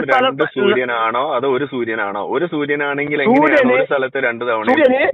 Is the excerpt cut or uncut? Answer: uncut